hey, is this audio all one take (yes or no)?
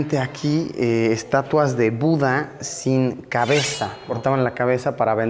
no